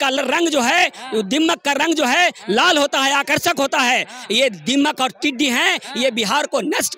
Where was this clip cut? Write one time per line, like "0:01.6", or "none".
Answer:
none